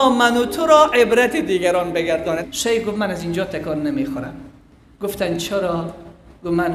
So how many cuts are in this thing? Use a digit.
1